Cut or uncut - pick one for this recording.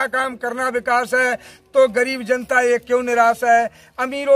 uncut